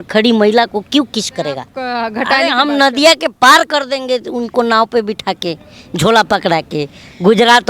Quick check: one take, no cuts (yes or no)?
no